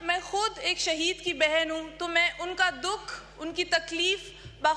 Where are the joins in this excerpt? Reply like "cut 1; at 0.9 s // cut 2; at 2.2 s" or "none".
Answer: none